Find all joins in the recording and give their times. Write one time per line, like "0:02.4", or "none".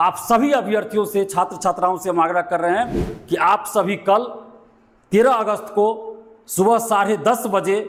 none